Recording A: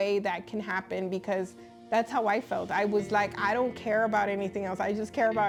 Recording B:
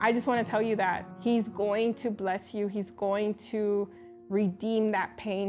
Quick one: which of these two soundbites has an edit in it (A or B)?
B